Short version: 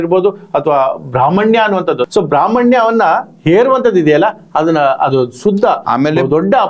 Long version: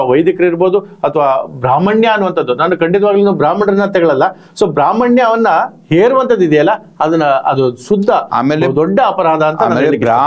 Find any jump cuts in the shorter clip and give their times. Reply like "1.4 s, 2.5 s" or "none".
2.0 s